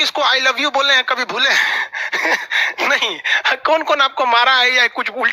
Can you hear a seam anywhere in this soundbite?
no; 0 cuts

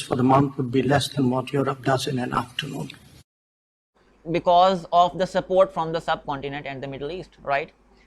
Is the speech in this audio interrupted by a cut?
yes; 1 cut; at 3.7 s

